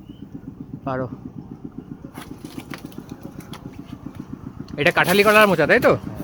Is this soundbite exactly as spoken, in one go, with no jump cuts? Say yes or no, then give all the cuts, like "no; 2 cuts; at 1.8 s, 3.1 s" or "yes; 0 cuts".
yes; 0 cuts